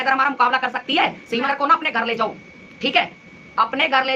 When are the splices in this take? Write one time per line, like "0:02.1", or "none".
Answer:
0:01.4